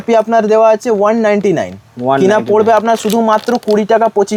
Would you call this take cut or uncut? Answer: uncut